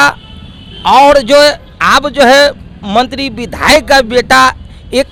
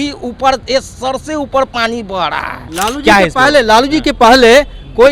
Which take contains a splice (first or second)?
second